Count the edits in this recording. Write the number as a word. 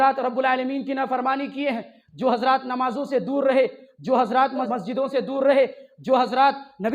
one